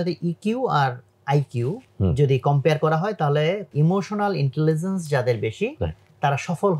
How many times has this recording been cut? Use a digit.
2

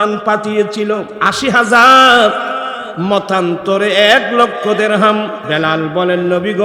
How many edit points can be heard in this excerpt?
2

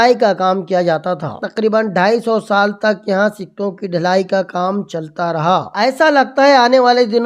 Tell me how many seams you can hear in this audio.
2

